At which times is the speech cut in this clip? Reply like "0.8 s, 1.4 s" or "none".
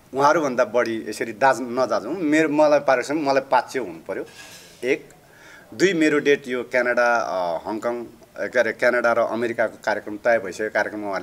none